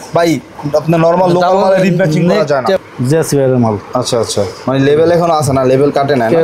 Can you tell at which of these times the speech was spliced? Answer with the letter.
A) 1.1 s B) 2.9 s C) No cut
B